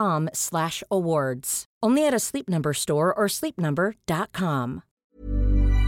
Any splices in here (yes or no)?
yes